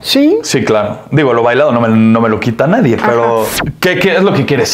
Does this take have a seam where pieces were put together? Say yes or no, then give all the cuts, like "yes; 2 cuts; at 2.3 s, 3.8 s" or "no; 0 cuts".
yes; 1 cut; at 3.6 s